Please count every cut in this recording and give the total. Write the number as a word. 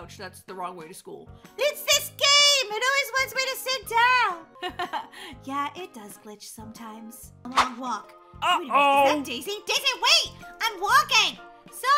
two